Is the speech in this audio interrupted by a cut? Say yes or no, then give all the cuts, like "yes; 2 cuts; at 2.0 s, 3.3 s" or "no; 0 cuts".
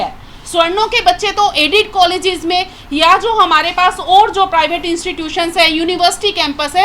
no; 0 cuts